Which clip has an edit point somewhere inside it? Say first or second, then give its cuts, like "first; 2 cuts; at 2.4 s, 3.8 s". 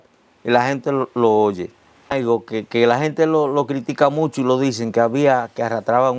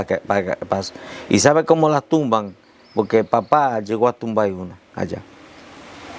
first; 1 cut; at 2.1 s